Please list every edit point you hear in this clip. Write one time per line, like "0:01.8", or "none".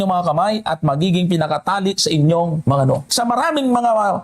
0:03.1